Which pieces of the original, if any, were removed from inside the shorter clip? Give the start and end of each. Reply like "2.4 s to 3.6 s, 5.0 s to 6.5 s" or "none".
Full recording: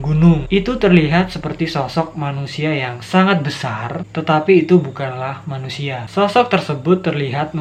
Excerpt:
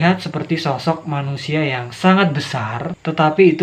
none